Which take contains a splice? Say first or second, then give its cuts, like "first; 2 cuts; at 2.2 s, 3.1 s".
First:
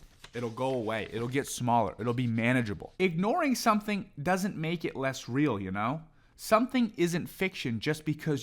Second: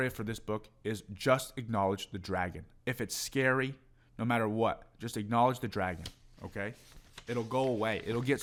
first; 1 cut; at 2.8 s